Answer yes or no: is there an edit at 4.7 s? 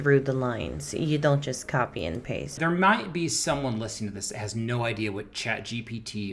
no